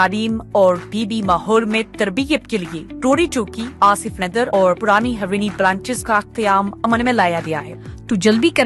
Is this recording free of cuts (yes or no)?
no